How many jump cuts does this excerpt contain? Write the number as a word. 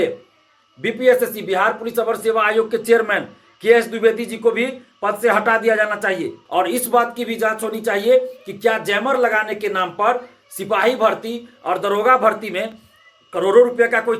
one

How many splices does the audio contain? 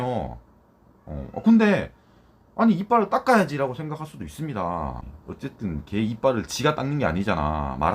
one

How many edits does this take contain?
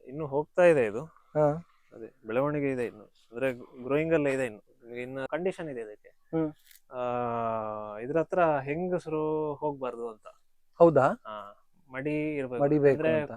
one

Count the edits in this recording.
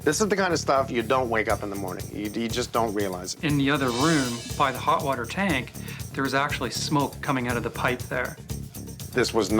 two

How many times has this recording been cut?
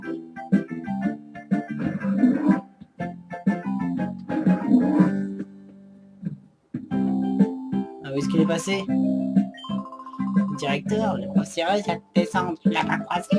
one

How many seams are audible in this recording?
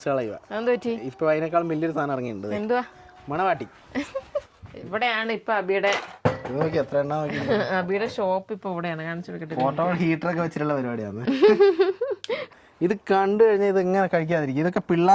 two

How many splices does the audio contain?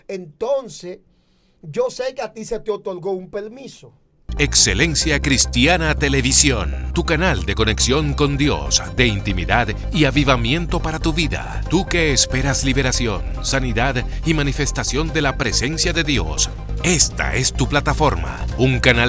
one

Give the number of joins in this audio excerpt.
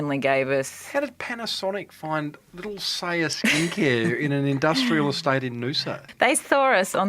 one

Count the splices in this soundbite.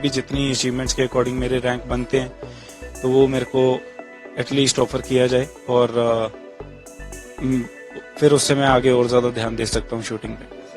zero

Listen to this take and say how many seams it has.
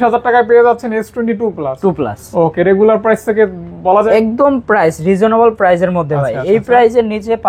one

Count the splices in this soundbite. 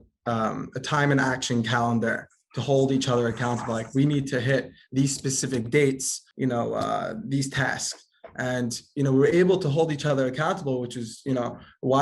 one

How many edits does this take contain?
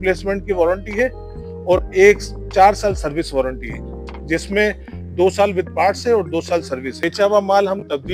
one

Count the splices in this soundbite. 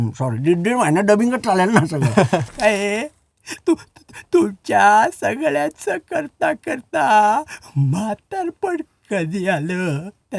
one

